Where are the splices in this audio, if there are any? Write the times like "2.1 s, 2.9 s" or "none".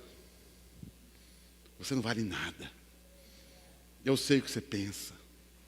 1.1 s